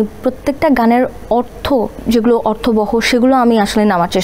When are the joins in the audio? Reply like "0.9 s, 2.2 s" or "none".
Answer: 2.0 s